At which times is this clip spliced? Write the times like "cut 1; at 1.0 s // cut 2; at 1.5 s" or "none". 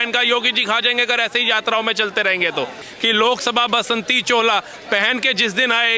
cut 1; at 2.8 s

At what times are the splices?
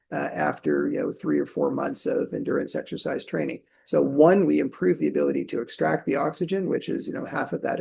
none

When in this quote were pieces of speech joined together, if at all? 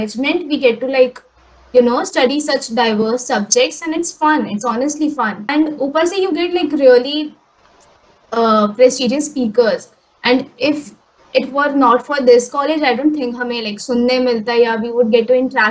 none

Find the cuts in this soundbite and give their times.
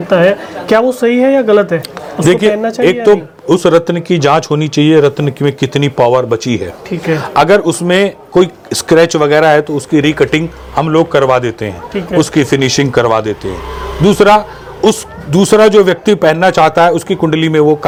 none

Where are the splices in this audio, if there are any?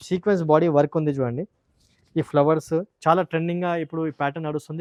none

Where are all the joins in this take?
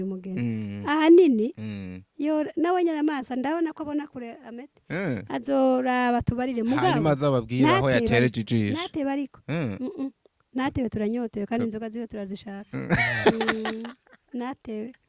none

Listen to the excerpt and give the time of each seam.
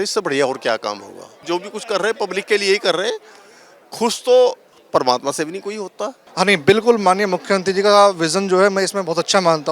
cut 1; at 1.3 s // cut 2; at 4.7 s // cut 3; at 6.2 s

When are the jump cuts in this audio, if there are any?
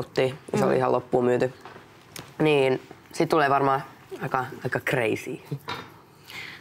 cut 1; at 1.1 s

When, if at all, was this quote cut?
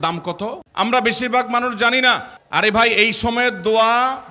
cut 1; at 2.3 s

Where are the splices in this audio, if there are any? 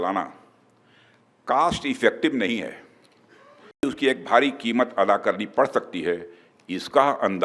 cut 1; at 3.8 s

